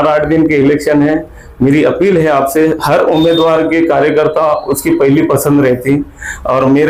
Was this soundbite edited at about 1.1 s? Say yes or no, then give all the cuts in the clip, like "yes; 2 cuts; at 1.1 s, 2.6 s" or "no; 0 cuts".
no; 0 cuts